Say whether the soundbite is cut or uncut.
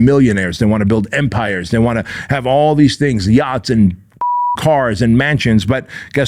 uncut